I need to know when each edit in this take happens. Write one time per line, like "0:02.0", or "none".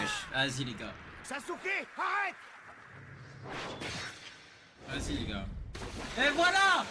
0:01.1